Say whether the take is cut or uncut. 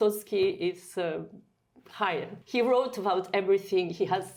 uncut